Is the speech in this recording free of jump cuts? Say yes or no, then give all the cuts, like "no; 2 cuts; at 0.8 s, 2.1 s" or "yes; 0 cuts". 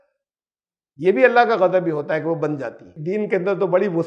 no; 1 cut; at 2.9 s